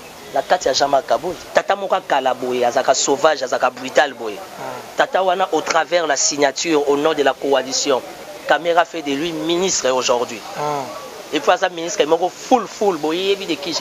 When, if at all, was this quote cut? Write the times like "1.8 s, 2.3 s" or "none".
1.4 s